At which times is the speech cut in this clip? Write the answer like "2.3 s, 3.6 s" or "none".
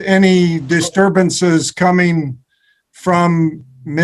none

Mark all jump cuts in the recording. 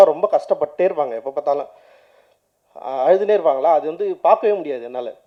none

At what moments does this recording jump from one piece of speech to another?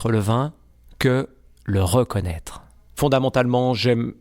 2.3 s

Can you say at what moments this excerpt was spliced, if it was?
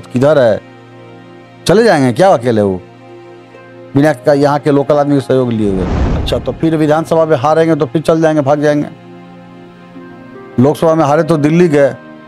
6.1 s

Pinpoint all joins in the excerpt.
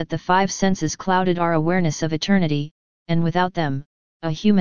1.5 s

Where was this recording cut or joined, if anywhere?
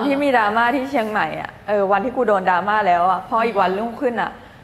none

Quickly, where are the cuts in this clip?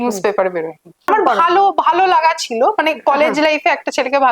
1.1 s

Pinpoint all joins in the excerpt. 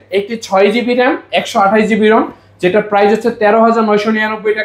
none

